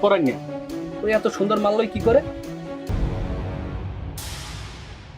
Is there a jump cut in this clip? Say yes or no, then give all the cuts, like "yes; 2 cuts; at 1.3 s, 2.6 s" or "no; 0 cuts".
yes; 1 cut; at 2.9 s